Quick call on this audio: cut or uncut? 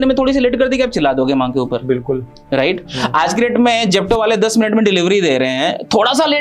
uncut